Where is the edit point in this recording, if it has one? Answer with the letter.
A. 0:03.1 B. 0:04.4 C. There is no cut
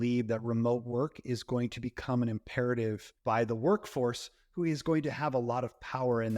A